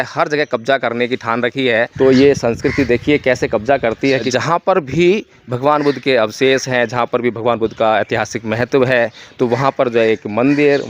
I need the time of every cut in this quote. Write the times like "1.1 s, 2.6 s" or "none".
1.9 s, 4.3 s